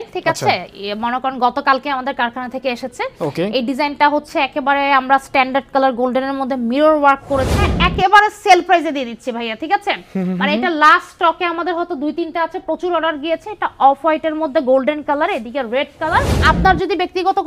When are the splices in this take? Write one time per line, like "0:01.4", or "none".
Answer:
0:07.7
0:16.4